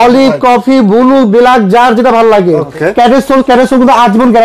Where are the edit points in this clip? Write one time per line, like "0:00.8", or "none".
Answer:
0:02.7